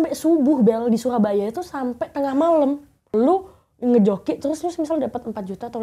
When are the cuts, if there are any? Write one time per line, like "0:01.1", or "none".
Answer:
0:03.1